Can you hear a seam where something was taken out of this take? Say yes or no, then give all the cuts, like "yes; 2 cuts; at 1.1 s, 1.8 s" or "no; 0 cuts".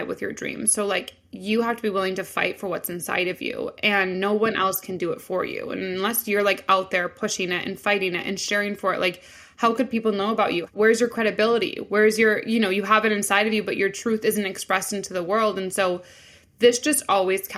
no; 0 cuts